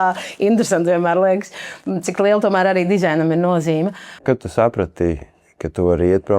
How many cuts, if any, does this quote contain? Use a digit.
1